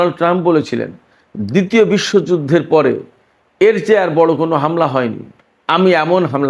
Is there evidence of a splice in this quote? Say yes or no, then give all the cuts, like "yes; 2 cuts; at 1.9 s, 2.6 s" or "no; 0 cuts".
no; 0 cuts